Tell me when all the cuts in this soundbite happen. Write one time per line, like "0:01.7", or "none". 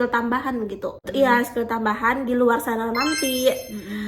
0:01.1